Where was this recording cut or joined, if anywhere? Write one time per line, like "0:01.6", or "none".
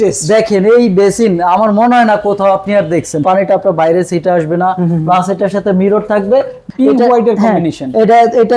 0:03.2
0:06.6